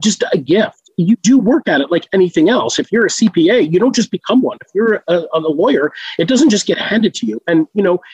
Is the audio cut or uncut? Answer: uncut